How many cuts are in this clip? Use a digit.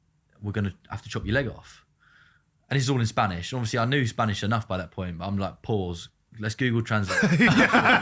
0